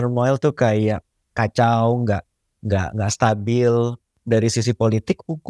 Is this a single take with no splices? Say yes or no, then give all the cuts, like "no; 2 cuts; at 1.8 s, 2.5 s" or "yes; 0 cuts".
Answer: no; 1 cut; at 4.1 s